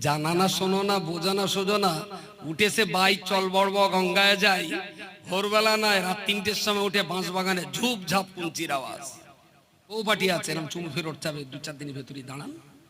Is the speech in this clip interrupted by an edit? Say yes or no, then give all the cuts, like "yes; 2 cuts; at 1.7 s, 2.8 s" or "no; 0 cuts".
yes; 1 cut; at 10.0 s